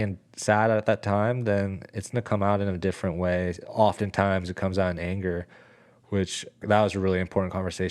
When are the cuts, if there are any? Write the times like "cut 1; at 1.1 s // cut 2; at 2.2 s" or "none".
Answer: cut 1; at 3.6 s // cut 2; at 6.6 s